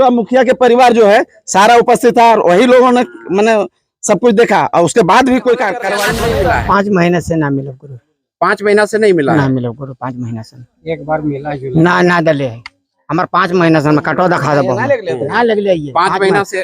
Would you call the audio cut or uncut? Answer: cut